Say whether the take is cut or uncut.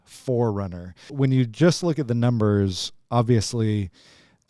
cut